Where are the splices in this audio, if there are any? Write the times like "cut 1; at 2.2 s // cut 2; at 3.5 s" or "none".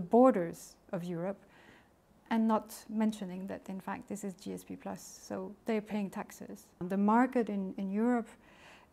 cut 1; at 6.8 s